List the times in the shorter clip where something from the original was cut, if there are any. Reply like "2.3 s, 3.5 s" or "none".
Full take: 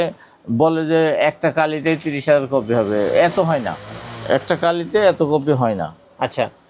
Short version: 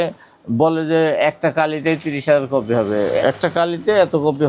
3.2 s